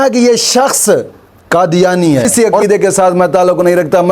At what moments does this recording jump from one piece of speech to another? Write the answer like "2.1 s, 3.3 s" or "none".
2.3 s